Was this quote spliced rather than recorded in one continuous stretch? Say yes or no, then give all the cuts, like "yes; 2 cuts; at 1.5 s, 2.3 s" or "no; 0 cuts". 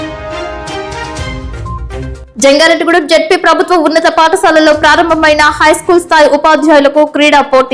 no; 0 cuts